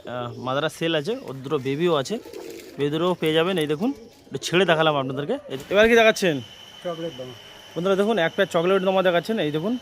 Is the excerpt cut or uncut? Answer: cut